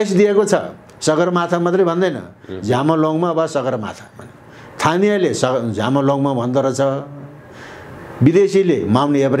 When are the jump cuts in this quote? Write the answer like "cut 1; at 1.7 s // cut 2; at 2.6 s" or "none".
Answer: none